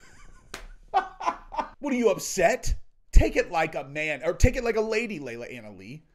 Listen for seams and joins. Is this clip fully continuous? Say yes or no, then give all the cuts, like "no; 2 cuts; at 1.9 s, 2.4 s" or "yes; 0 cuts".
no; 1 cut; at 1.7 s